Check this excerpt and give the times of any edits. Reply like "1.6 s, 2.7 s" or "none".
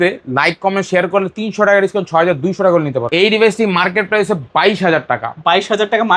3.1 s

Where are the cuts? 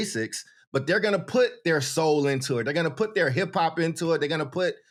none

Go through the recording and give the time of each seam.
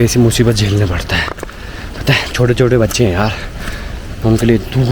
none

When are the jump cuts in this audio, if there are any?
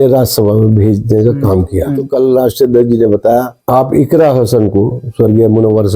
2.0 s, 3.6 s

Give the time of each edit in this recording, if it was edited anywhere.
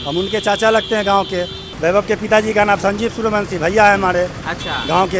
1.6 s

